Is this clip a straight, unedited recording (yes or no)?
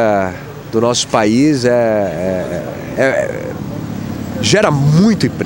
yes